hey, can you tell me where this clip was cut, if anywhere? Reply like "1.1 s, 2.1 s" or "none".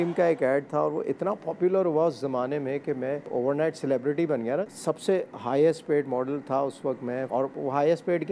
3.3 s, 4.7 s, 7.3 s